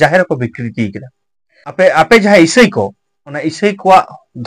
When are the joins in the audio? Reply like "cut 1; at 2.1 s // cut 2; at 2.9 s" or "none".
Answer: cut 1; at 1.9 s